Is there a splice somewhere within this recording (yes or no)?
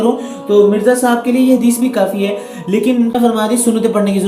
yes